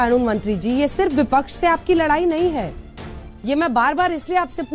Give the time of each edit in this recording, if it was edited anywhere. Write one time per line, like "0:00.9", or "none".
none